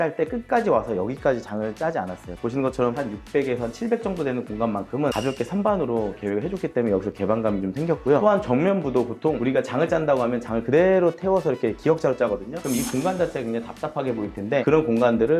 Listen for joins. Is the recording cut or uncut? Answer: uncut